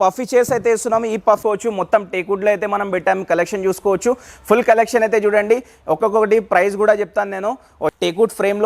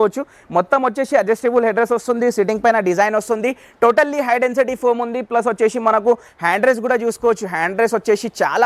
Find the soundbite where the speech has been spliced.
first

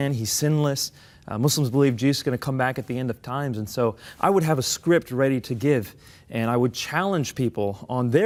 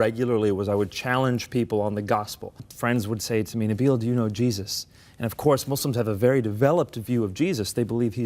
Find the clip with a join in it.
second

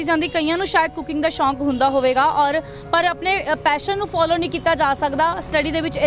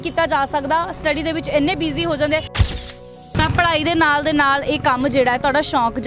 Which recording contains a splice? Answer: second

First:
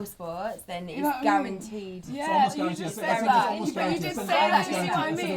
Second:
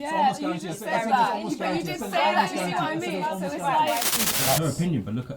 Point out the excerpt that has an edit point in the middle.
second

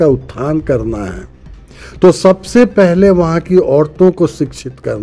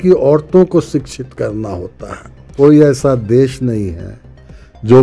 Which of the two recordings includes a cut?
second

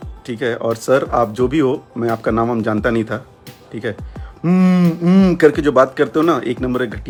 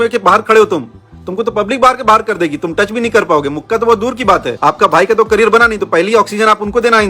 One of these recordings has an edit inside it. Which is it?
second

